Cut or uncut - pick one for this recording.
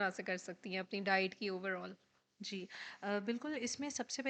uncut